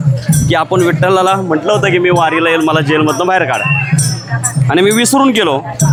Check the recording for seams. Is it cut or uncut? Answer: uncut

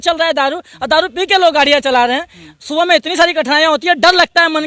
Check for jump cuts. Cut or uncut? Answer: uncut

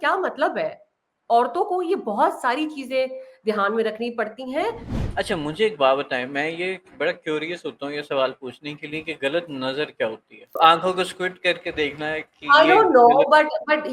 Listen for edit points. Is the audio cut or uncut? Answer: cut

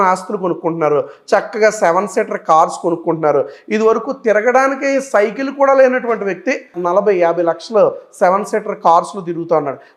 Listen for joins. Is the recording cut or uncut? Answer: uncut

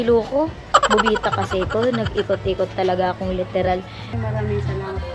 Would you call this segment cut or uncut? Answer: cut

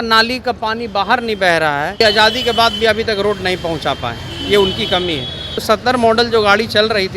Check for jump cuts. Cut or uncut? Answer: cut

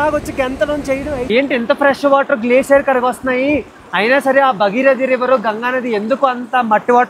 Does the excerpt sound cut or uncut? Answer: cut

